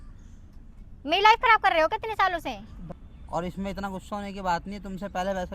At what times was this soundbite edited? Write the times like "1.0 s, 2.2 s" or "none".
3.3 s